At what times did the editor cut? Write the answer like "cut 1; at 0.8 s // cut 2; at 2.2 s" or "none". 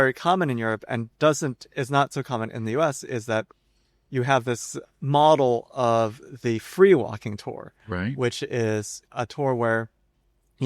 cut 1; at 4.7 s